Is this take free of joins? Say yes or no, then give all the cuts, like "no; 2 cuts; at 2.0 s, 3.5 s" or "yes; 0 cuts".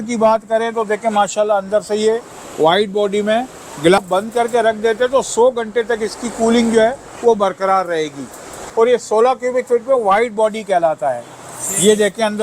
no; 2 cuts; at 4.0 s, 8.6 s